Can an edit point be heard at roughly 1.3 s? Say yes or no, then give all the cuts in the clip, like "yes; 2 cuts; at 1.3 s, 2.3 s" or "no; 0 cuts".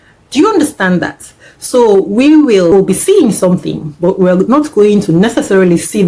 no; 1 cut; at 2.7 s